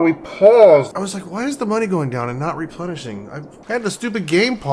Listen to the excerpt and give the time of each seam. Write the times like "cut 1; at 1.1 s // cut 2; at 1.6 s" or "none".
cut 1; at 0.9 s // cut 2; at 3.5 s